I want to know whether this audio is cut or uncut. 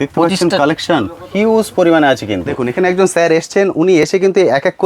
cut